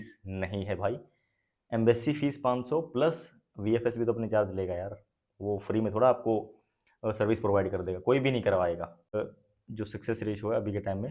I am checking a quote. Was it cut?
yes; 1 cut; at 9.1 s

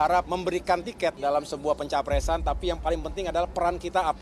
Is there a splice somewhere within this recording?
yes; 1 cut; at 1.2 s

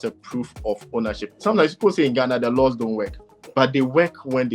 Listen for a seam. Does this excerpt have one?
yes; 1 cut; at 1.3 s

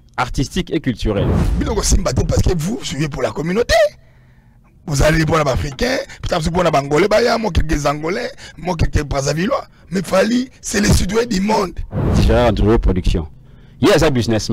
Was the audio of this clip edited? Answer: yes; 2 cuts; at 1.3 s, 12.2 s

